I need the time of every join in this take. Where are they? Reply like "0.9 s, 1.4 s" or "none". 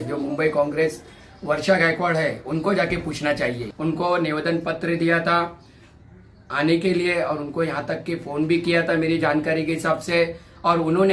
3.7 s

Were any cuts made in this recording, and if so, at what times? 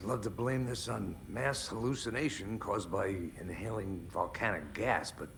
none

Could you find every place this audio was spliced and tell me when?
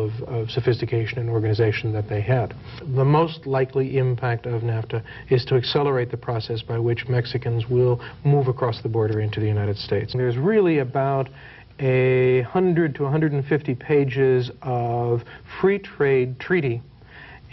2.7 s, 10.1 s

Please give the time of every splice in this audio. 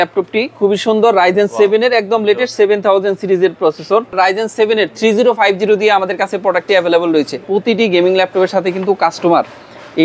4.1 s, 7.4 s

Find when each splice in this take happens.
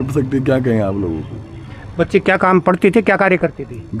none

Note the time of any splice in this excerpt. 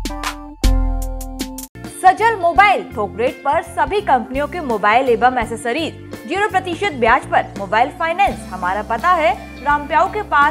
none

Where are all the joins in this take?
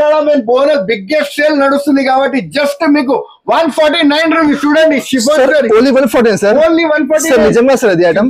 none

